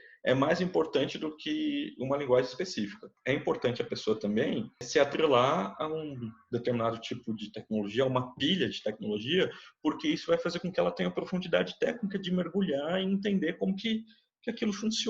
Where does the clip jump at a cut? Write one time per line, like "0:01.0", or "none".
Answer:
0:03.1
0:04.9